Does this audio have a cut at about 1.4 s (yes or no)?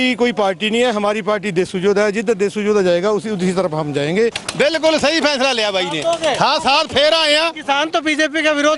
no